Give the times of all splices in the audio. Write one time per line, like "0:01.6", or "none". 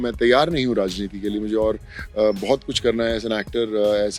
none